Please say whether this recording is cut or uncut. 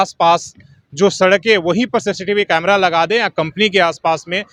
uncut